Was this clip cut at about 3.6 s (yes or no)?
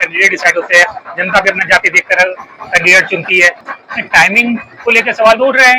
yes